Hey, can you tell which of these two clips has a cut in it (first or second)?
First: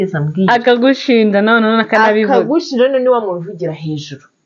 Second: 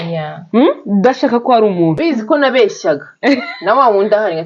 second